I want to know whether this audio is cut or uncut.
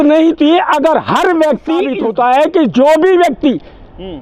cut